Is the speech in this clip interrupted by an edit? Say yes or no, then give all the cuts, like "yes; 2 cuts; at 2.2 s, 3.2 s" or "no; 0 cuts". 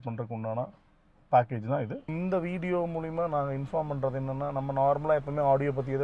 yes; 1 cut; at 2.0 s